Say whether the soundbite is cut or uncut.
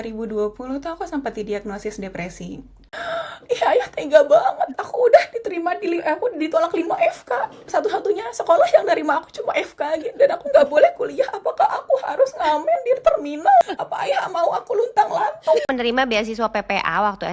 cut